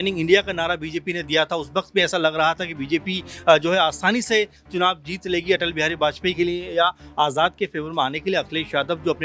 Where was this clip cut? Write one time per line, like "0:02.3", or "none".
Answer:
0:06.4

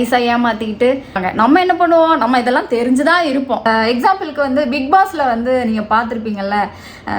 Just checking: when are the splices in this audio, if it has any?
0:01.1
0:03.6

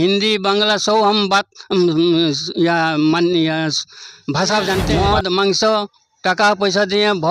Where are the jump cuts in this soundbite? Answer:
0:04.9

